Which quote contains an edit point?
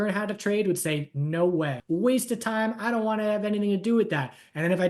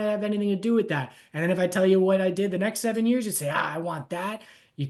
first; 1 cut; at 1.8 s

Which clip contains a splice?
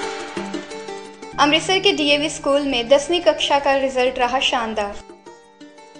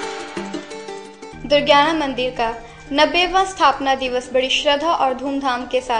second; 1 cut; at 1.1 s

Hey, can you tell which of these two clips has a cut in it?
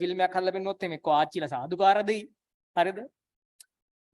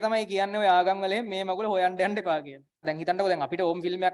second; 1 cut; at 2.8 s

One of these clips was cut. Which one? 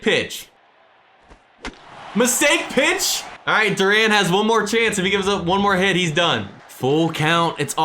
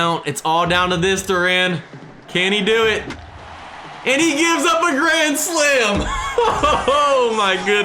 first; 1 cut; at 3.4 s

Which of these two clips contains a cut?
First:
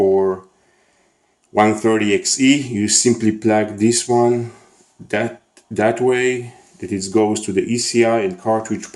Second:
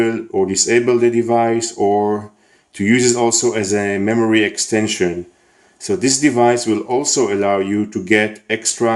first; 1 cut; at 7.1 s

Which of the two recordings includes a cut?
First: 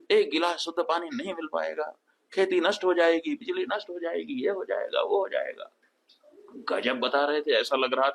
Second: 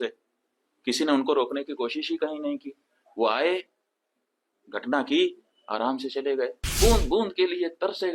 second; 1 cut; at 6.6 s

